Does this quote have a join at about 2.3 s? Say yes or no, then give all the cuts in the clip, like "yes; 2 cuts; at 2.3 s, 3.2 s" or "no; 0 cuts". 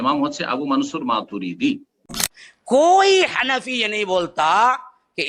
yes; 1 cut; at 2.3 s